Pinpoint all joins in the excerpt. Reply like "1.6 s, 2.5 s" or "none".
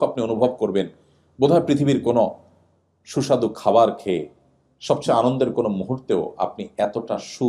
none